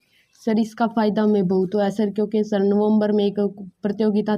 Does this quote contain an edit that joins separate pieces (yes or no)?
no